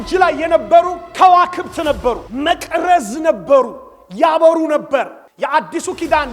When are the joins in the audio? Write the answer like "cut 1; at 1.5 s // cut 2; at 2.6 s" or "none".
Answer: cut 1; at 2.3 s // cut 2; at 5.2 s